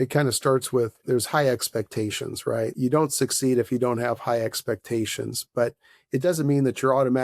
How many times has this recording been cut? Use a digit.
1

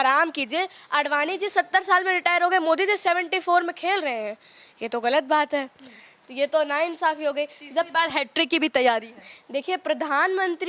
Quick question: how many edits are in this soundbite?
0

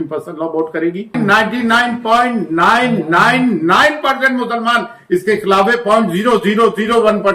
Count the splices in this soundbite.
1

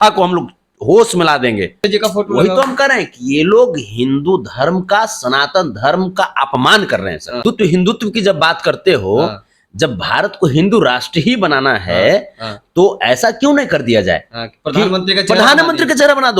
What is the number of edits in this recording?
2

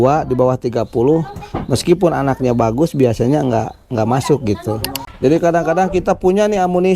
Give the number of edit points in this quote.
1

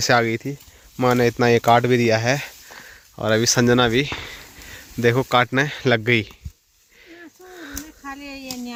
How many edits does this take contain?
0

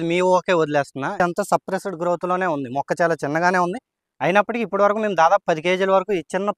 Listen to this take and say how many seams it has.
1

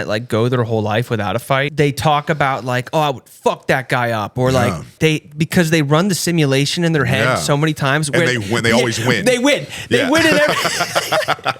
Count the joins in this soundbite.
2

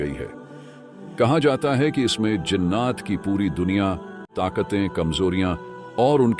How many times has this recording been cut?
1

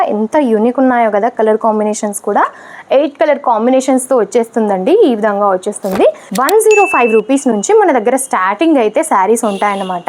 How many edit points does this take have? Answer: 1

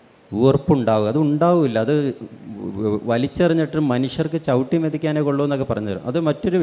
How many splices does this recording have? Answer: 0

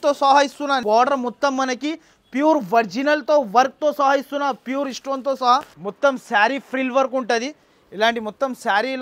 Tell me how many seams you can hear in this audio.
2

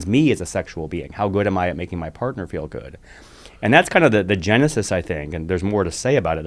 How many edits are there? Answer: 0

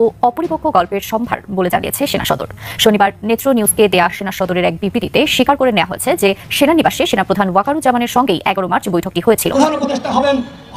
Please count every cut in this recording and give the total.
1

